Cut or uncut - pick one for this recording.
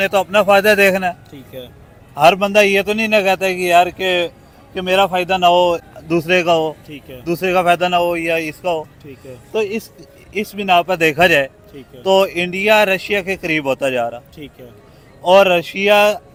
uncut